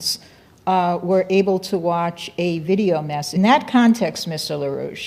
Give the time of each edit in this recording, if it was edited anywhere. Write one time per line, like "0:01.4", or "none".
none